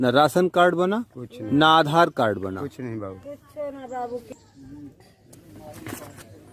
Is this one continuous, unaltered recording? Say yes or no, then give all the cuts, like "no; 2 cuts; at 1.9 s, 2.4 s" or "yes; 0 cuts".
no; 1 cut; at 5.3 s